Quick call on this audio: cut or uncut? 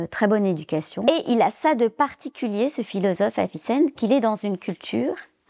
cut